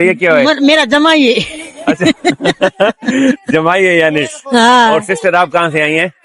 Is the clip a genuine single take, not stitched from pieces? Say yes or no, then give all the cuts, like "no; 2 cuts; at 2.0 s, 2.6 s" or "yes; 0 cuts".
yes; 0 cuts